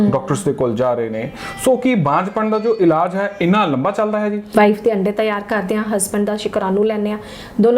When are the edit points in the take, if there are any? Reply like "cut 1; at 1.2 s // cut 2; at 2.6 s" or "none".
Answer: cut 1; at 4.5 s